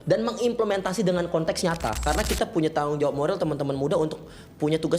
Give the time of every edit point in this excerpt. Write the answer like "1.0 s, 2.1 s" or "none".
2.0 s